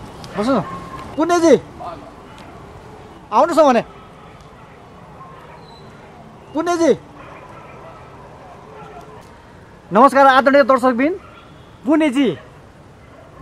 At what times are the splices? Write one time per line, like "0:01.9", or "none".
0:01.0
0:01.7